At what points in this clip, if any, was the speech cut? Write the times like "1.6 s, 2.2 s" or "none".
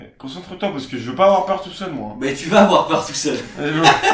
none